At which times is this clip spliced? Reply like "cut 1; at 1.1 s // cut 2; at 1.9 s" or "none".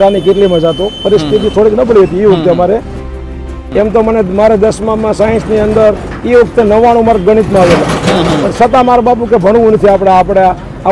cut 1; at 3.3 s